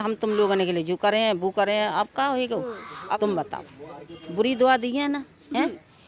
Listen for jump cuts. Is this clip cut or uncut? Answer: cut